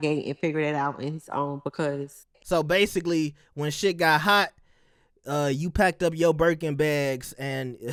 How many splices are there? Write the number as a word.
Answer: zero